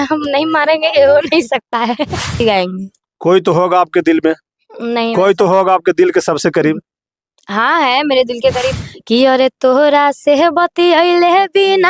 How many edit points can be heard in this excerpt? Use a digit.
2